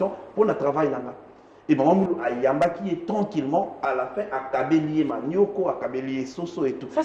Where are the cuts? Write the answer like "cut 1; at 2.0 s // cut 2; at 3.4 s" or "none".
none